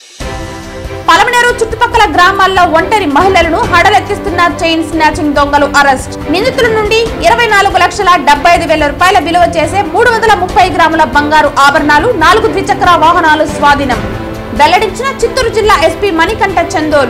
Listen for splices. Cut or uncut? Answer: uncut